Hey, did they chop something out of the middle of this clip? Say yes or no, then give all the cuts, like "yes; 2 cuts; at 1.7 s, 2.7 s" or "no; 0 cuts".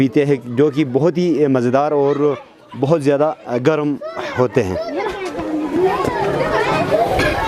no; 0 cuts